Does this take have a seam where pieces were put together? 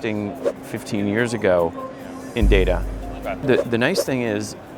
yes; 1 cut; at 3.4 s

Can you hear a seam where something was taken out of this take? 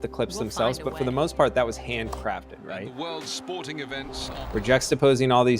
yes; 1 cut; at 4.1 s

